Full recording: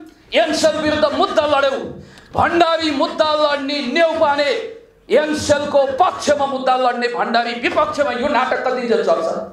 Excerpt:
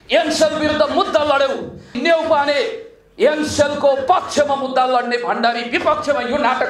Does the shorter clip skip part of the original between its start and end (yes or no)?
yes